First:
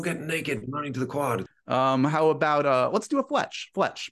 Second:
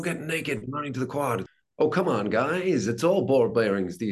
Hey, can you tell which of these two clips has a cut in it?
second; 1 cut; at 1.5 s

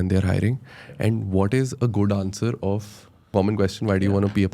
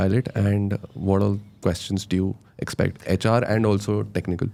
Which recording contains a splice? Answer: first; 1 cut; at 3.3 s

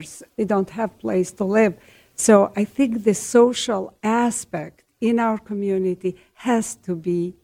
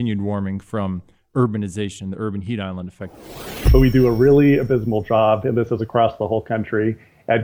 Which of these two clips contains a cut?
second; 1 cut; at 3.5 s

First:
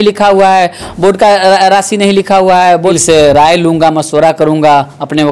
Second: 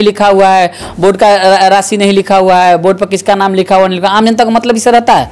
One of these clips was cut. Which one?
first; 1 cut; at 3.0 s

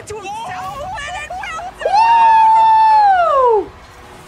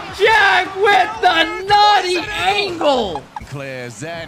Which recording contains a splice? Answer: second; 1 cut; at 3.3 s

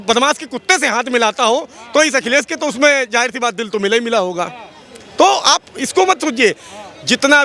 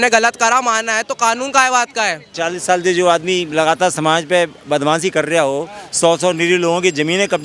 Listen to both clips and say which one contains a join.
second; 1 cut; at 2.3 s

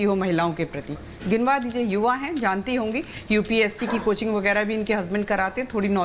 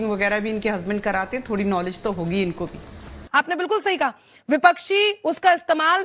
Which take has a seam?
second; 1 cut; at 3.1 s

